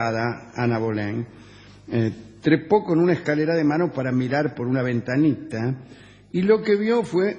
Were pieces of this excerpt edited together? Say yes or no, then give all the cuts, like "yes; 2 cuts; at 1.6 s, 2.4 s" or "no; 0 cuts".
no; 0 cuts